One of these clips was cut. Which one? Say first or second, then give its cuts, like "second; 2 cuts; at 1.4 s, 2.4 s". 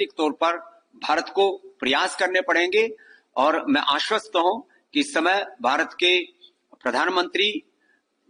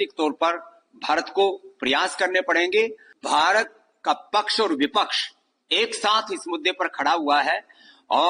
second; 1 cut; at 3.1 s